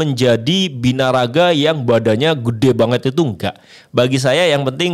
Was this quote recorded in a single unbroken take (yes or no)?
yes